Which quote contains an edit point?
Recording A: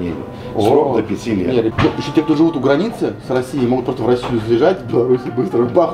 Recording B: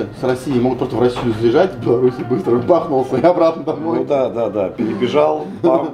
A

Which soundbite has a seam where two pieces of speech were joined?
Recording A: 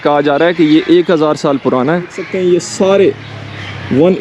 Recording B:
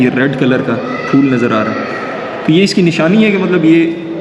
A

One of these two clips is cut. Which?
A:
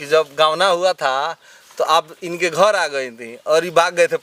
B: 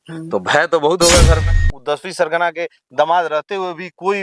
B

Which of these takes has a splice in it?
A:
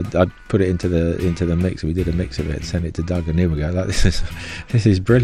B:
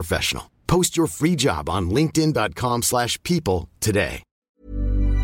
B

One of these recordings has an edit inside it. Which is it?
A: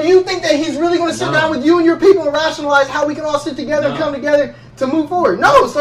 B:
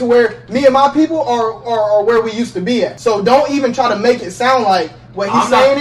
B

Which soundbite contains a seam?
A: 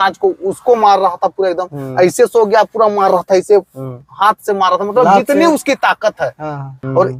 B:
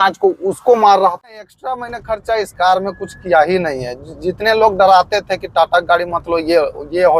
B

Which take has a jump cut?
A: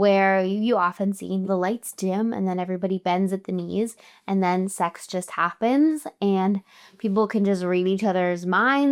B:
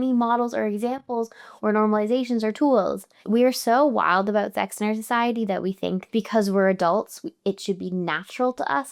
B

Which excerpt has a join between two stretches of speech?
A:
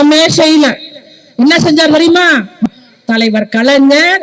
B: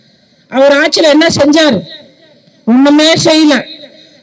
A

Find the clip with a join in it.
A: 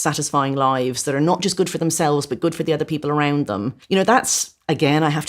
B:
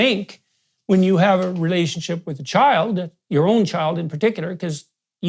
A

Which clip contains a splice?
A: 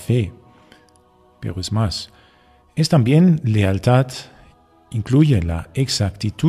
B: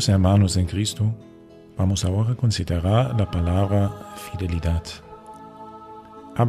A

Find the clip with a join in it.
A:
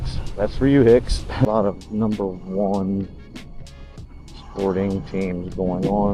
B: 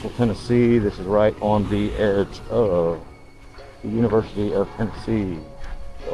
A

